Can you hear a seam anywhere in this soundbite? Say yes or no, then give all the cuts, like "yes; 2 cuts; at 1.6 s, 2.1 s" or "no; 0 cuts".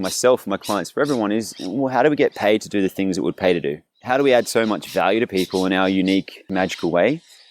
yes; 2 cuts; at 3.9 s, 6.5 s